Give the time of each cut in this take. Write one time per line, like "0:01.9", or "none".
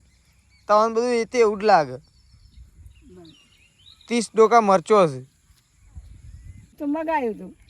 0:06.8